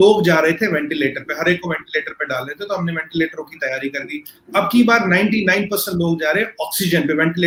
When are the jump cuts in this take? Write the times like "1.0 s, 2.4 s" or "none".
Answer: none